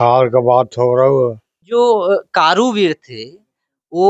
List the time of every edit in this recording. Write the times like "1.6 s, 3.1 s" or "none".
1.7 s